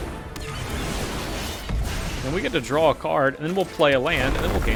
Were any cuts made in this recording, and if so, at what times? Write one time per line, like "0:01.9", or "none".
none